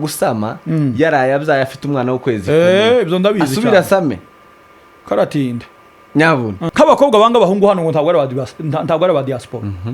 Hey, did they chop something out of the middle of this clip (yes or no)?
yes